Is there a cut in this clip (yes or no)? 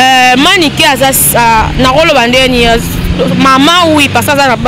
no